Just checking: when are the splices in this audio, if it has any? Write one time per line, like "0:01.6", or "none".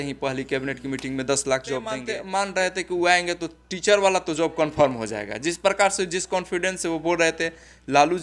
0:02.1